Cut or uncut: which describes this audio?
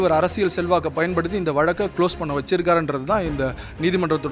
uncut